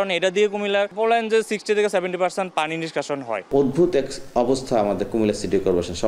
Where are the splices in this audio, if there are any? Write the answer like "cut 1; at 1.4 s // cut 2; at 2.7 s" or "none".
cut 1; at 0.9 s // cut 2; at 3.4 s